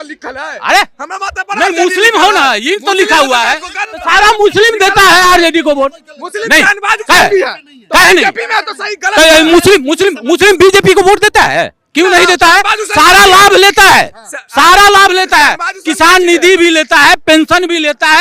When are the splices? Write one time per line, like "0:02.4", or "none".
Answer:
none